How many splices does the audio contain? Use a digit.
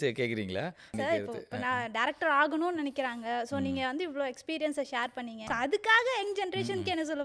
2